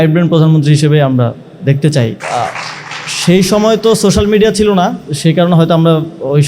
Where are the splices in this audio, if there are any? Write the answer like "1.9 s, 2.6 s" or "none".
2.2 s, 5.0 s